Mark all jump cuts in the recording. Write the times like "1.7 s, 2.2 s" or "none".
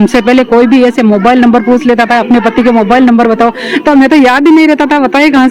none